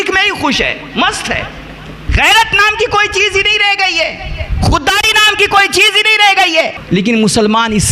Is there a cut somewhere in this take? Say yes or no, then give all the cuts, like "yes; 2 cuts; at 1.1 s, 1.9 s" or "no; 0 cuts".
yes; 2 cuts; at 2.0 s, 6.8 s